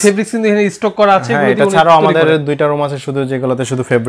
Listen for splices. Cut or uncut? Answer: uncut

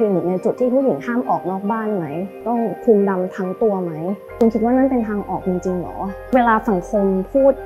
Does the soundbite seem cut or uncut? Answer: cut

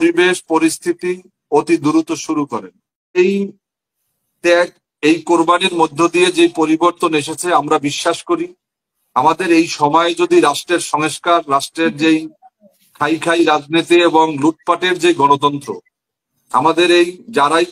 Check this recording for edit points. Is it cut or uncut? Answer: cut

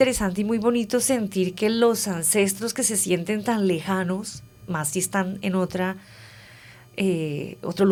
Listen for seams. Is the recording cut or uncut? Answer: uncut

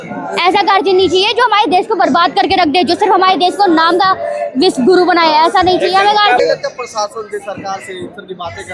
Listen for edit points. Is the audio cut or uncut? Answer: cut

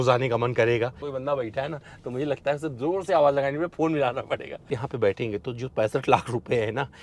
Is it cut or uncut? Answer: cut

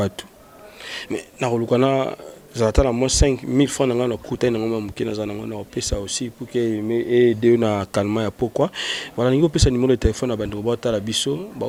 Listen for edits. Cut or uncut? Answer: uncut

